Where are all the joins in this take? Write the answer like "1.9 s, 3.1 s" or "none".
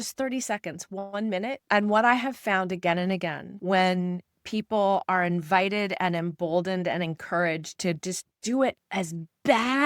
1.6 s